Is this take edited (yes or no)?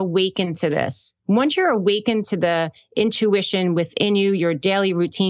no